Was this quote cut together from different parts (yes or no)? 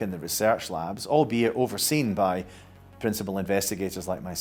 no